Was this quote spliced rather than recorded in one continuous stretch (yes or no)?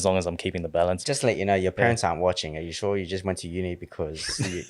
yes